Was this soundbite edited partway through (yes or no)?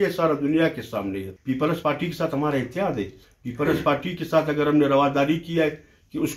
yes